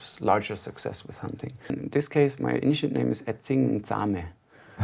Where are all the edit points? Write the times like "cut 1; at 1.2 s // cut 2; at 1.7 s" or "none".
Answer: cut 1; at 1.7 s

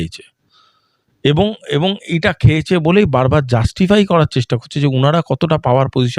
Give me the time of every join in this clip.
none

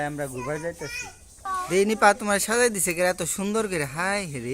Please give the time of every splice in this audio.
cut 1; at 1.4 s

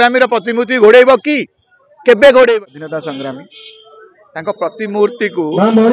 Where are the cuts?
cut 1; at 2.6 s

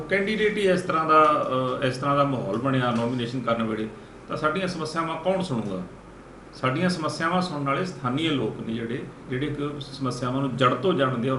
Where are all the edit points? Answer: none

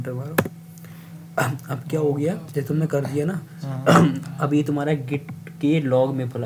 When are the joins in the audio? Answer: none

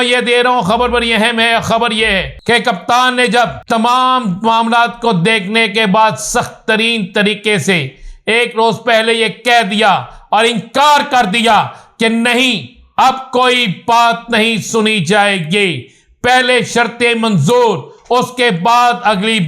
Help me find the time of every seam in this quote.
cut 1; at 2.3 s // cut 2; at 3.6 s

